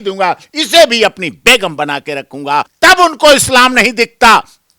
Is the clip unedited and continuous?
no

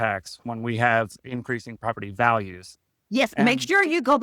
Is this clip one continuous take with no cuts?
yes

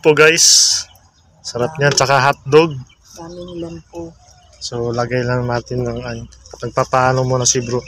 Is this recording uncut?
yes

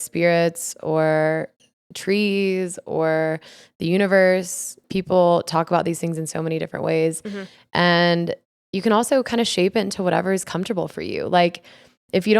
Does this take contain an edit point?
yes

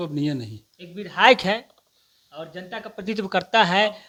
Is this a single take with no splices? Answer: yes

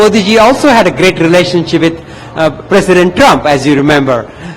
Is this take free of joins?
yes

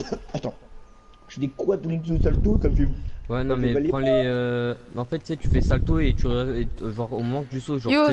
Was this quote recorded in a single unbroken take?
yes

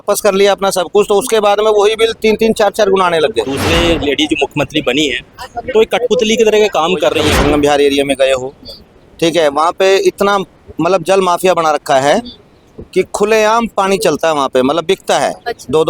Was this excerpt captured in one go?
no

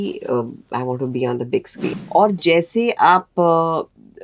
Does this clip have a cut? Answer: yes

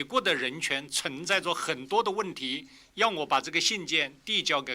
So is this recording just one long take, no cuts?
yes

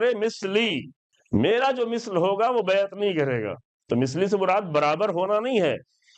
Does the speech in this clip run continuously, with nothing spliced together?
no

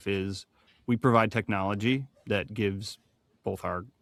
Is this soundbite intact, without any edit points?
yes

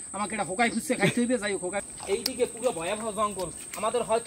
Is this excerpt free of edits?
no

